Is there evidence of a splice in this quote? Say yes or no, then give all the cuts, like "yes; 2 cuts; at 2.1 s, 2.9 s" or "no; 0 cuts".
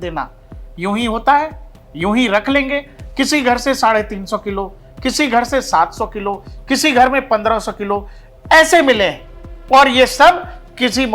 no; 0 cuts